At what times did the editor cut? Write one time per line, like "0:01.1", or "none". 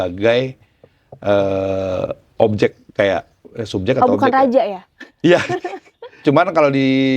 0:06.2